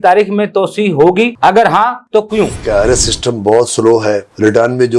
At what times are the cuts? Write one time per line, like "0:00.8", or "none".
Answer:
0:02.6